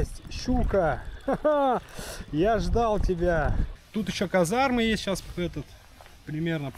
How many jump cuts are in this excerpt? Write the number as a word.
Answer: one